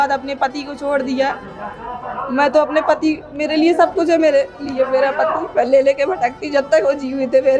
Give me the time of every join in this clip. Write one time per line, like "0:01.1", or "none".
none